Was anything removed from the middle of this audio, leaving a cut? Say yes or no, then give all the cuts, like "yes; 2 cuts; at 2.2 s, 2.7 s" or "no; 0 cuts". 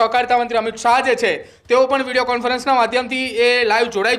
no; 0 cuts